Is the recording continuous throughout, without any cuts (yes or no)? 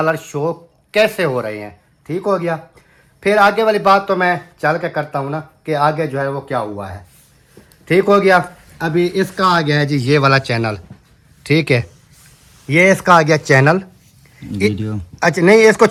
yes